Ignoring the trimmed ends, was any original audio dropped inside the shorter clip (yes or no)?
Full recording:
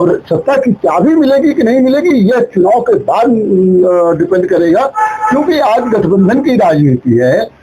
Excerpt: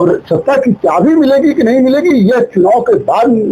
no